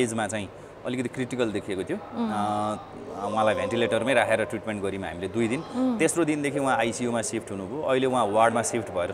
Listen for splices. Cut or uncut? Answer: uncut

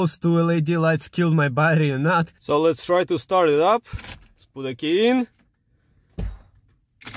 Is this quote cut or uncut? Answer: cut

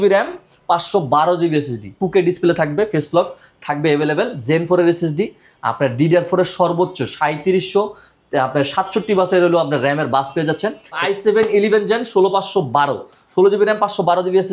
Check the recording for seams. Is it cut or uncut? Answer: cut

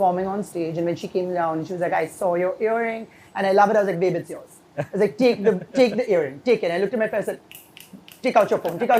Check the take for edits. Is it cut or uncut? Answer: uncut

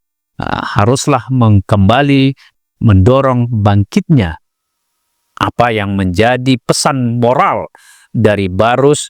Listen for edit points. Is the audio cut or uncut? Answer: uncut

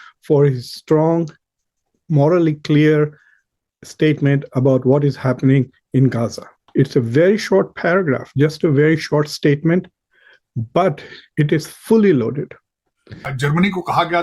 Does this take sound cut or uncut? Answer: cut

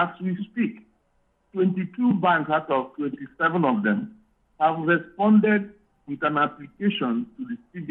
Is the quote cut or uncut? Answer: uncut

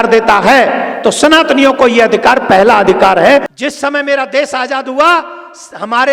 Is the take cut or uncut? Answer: cut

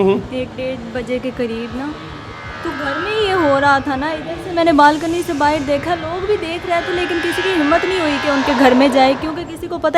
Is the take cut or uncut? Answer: uncut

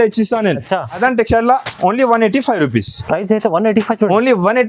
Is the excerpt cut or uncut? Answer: cut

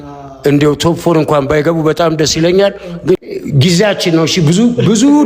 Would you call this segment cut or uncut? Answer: cut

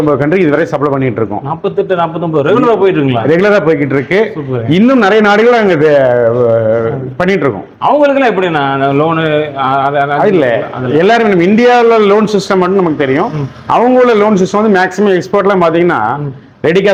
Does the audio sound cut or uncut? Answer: uncut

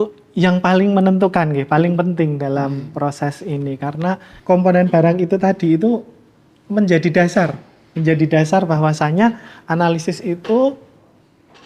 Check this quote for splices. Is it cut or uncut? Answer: cut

